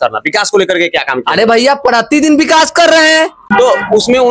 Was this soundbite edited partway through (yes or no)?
yes